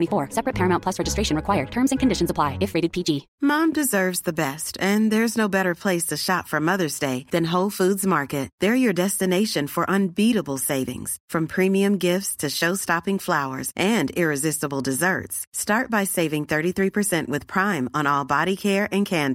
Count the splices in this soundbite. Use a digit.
1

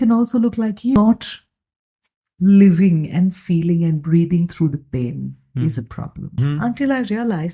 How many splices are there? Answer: 2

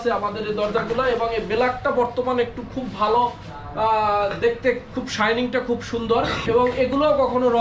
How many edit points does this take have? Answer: 1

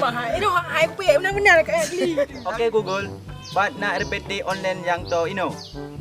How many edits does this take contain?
1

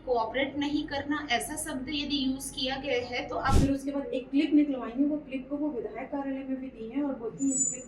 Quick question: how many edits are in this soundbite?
1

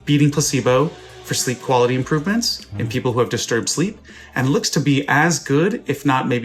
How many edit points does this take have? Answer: 0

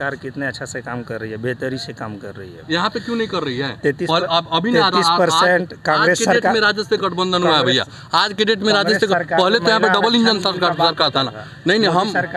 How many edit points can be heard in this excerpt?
0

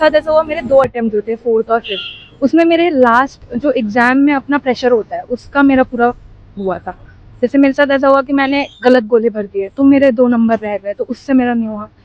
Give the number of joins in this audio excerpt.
0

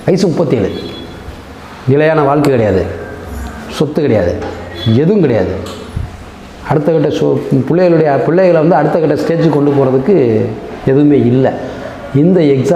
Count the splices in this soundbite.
0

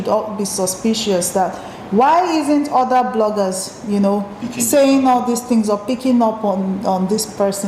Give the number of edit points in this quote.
0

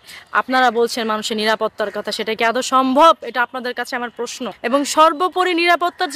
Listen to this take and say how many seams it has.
1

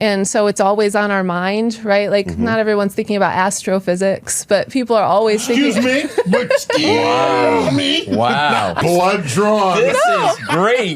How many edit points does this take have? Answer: 1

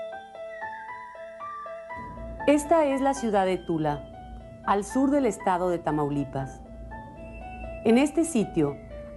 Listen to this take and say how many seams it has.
0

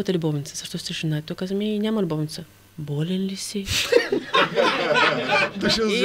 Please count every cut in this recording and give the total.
0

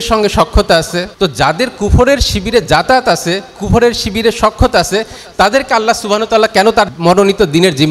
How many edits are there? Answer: 2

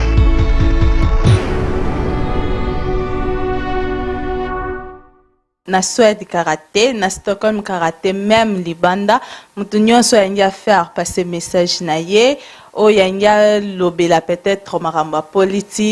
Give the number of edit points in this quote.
1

